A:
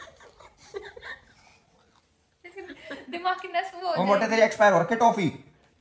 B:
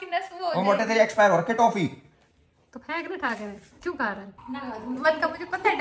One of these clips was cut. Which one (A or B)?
B